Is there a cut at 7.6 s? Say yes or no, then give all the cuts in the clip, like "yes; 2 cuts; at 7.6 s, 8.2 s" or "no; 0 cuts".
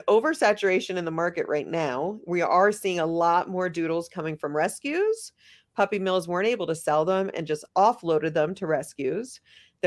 yes; 1 cut; at 7.6 s